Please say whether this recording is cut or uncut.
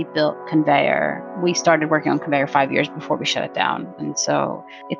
cut